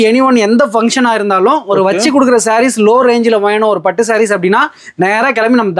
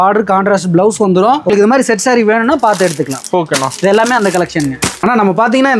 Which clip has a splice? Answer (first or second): second